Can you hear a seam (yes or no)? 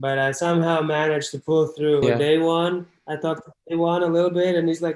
yes